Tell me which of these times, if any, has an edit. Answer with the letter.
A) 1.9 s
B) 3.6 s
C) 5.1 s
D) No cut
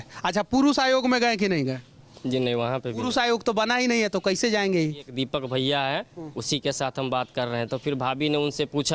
C